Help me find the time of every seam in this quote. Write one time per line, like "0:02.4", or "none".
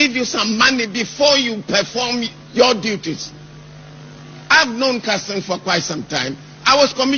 none